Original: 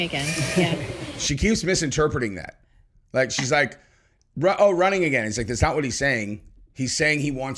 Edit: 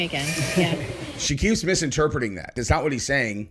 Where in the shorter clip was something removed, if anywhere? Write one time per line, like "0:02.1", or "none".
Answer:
0:02.5